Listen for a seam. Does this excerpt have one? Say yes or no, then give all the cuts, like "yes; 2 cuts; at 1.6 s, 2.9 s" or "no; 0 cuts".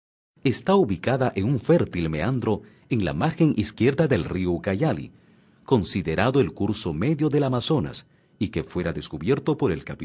yes; 1 cut; at 4.1 s